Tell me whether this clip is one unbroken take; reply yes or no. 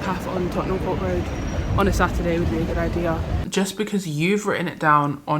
no